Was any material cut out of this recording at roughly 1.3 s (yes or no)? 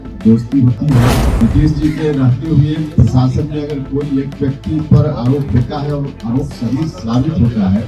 yes